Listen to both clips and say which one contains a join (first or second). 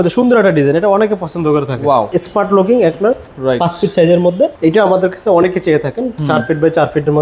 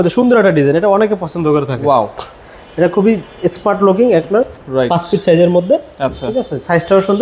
first